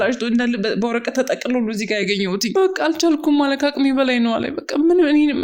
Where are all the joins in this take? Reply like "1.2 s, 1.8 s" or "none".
2.5 s